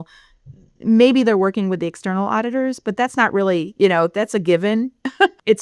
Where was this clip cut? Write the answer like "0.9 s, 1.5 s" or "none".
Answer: none